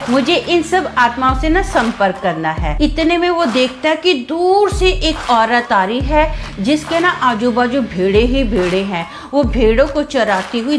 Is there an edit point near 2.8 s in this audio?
yes; 1 cut; at 2.8 s

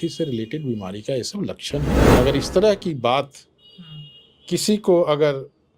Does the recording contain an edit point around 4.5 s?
no; 1 cut; at 2.1 s

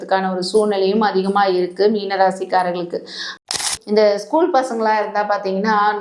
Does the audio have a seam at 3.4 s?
yes; 1 cut; at 3.4 s

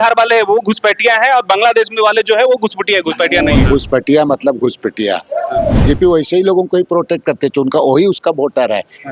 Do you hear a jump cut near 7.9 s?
no; 2 cuts; at 3.6 s, 5.8 s

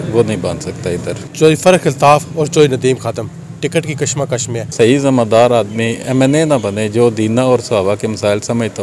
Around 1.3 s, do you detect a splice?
yes; 2 cuts; at 1.3 s, 4.6 s

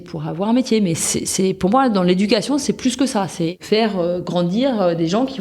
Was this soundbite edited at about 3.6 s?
yes; 1 cut; at 3.6 s

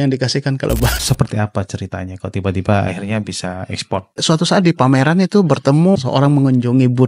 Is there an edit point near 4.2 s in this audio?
yes; 3 cuts; at 0.9 s, 4.2 s, 6.0 s

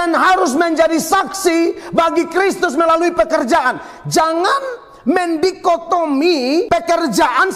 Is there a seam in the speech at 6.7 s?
yes; 1 cut; at 6.7 s

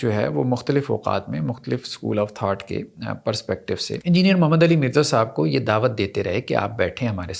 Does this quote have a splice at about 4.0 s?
yes; 1 cut; at 4.0 s

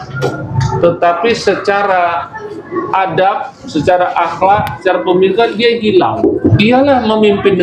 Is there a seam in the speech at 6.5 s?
yes; 1 cut; at 6.5 s

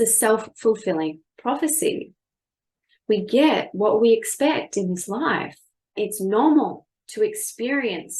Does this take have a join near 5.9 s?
yes; 1 cut; at 5.9 s

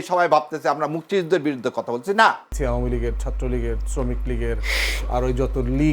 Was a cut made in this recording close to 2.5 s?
yes; 1 cut; at 2.5 s

